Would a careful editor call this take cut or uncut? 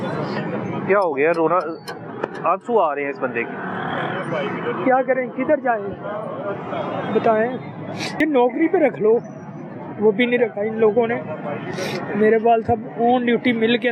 cut